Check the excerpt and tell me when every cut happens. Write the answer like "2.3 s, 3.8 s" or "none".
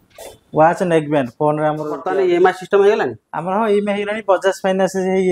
2.0 s